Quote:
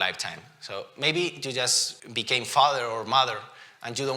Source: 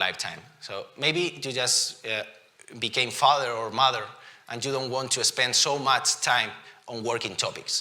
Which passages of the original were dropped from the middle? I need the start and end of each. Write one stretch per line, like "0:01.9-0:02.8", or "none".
0:01.9-0:02.5